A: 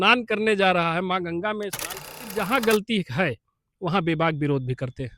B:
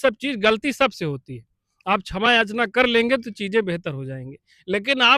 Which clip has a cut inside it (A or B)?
A